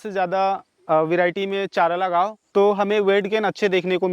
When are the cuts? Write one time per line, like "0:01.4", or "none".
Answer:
0:02.4